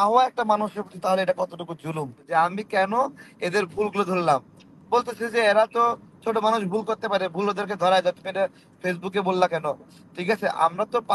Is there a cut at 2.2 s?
yes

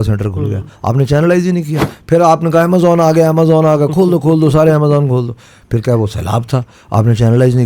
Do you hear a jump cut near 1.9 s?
yes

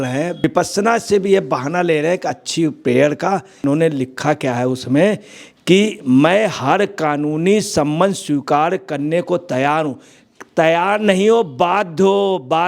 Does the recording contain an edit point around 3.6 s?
yes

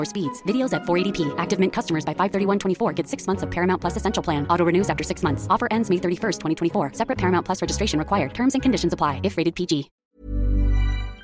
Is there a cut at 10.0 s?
yes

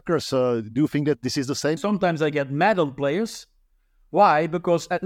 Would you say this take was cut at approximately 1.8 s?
yes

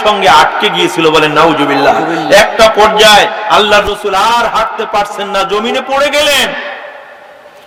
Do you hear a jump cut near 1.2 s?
no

